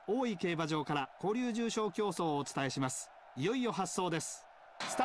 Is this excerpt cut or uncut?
uncut